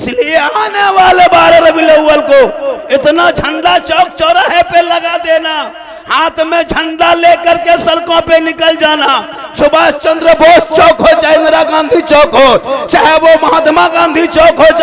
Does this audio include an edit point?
no; 0 cuts

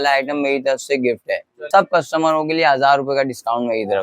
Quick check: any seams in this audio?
yes; 1 cut; at 1.5 s

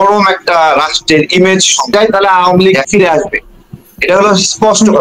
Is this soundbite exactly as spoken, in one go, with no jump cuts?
no; 1 cut; at 2.3 s

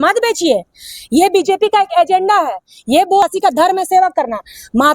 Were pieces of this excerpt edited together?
yes; 1 cut; at 3.2 s

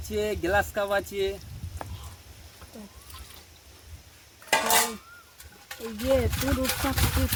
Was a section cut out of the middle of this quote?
no; 0 cuts

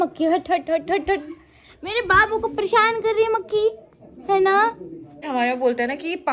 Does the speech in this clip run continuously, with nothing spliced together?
no; 1 cut; at 5.2 s

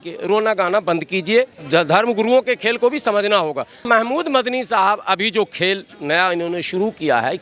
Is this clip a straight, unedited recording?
no; 2 cuts; at 1.6 s, 3.8 s

